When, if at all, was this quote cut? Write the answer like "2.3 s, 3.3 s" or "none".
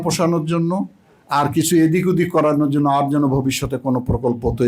none